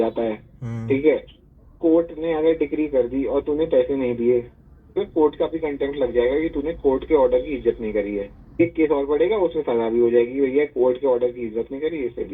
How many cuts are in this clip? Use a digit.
2